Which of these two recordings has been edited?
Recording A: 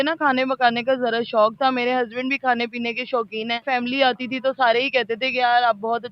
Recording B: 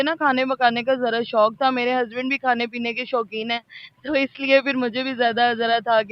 A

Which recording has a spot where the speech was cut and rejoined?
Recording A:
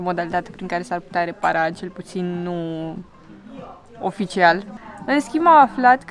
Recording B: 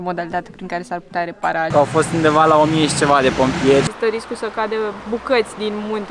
B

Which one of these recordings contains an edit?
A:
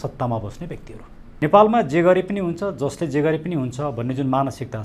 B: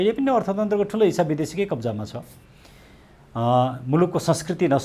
A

